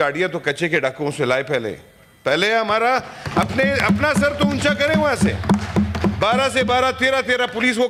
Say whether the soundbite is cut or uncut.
uncut